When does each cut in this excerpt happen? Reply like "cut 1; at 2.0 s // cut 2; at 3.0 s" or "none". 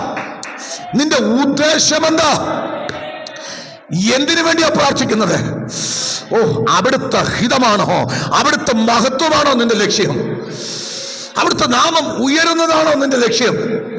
none